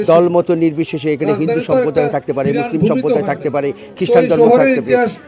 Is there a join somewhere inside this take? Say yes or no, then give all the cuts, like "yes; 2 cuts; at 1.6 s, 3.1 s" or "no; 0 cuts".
no; 0 cuts